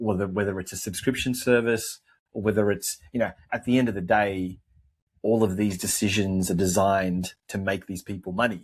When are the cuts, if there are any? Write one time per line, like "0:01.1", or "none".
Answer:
none